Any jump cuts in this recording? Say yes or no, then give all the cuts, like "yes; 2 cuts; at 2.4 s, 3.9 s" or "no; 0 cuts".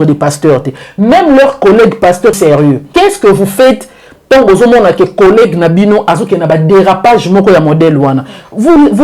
yes; 1 cut; at 2.3 s